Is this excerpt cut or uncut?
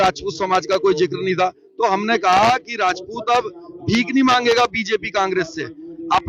uncut